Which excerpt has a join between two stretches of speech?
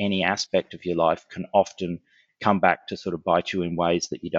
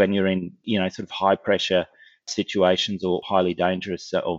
second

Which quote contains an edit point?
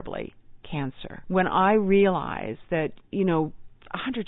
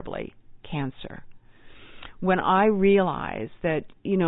first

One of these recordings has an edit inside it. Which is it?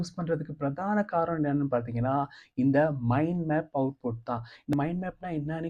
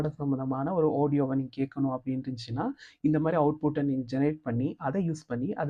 first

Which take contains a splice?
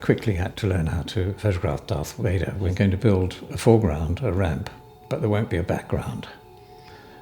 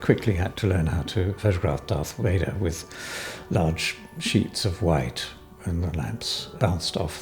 first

